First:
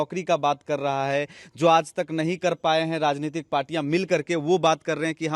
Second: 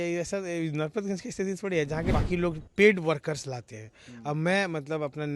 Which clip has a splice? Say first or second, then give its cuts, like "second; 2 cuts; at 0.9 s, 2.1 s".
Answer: second; 1 cut; at 2.1 s